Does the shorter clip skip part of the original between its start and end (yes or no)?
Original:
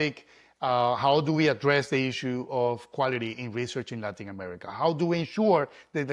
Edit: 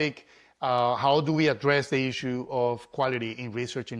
no